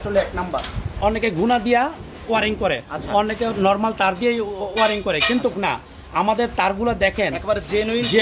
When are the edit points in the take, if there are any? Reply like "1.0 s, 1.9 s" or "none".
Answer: 0.9 s